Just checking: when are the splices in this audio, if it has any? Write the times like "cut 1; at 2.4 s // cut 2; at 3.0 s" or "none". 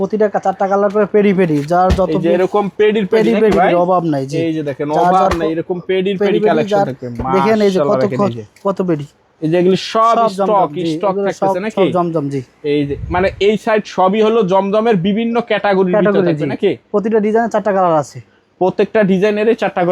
none